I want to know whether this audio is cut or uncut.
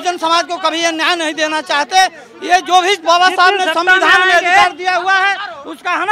uncut